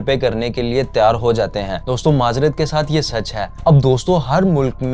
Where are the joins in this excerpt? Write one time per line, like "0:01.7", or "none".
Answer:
none